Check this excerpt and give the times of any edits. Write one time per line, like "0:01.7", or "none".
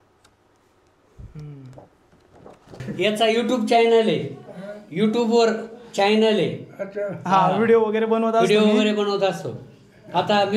0:02.8